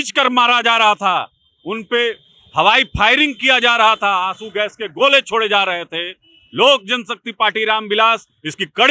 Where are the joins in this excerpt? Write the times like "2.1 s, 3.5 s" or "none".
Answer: none